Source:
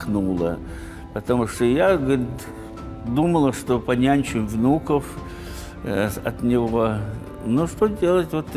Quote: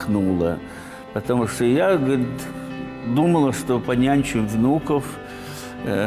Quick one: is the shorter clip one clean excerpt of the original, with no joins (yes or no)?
yes